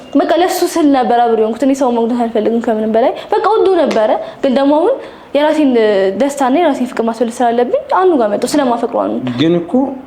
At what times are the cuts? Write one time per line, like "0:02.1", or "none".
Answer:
none